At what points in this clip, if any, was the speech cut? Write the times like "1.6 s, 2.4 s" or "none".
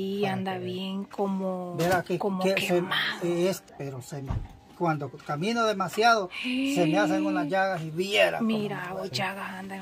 3.8 s